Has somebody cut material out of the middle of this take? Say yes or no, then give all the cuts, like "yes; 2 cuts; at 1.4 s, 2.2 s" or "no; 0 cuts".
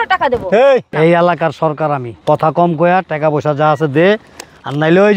yes; 2 cuts; at 0.9 s, 2.1 s